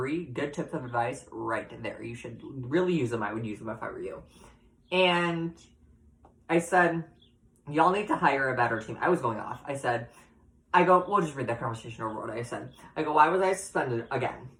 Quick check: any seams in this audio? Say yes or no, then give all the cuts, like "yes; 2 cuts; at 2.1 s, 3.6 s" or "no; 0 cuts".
no; 0 cuts